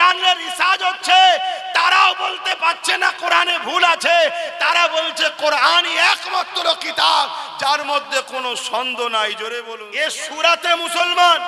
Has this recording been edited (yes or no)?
yes